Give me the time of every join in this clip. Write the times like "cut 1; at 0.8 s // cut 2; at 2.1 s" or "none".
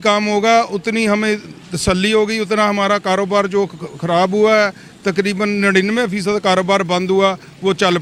none